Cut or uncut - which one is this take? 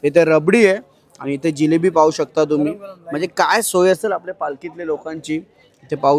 uncut